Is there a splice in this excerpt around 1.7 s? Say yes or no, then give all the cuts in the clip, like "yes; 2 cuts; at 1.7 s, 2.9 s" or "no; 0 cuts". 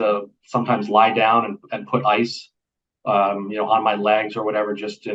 no; 0 cuts